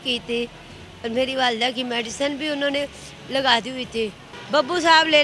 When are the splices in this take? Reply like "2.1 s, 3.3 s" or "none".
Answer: 4.3 s